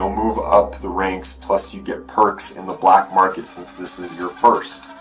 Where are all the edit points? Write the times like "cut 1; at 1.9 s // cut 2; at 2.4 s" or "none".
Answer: none

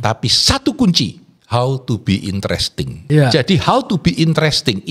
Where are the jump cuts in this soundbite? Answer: cut 1; at 1.3 s // cut 2; at 2.9 s

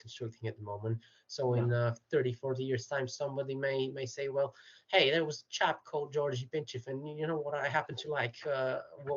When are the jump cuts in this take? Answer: none

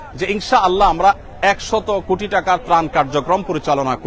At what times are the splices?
none

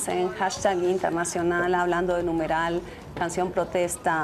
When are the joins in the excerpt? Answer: cut 1; at 2.3 s

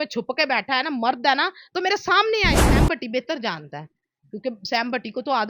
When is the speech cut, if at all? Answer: cut 1; at 2.7 s

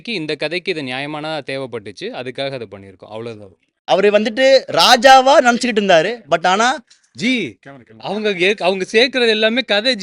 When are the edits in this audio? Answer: cut 1; at 3.8 s

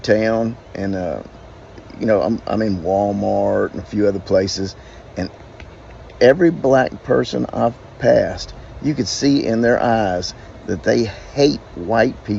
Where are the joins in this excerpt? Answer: none

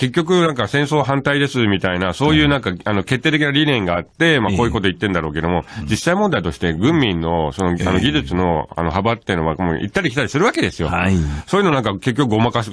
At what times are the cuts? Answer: cut 1; at 2.0 s

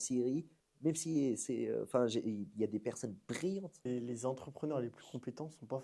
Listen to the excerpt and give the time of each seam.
cut 1; at 3.9 s

